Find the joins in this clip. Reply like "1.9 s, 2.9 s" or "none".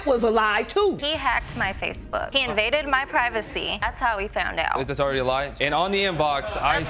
1.0 s